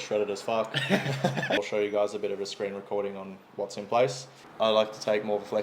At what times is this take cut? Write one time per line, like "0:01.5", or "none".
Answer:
0:01.6
0:04.3